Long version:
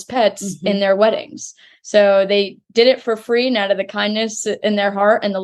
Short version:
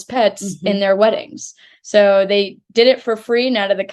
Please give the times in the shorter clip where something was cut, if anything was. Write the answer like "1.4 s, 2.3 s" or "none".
none